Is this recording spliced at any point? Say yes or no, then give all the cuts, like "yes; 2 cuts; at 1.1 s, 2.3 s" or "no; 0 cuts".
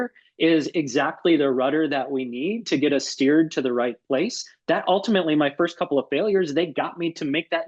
no; 0 cuts